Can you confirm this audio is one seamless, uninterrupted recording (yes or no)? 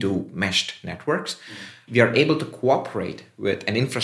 no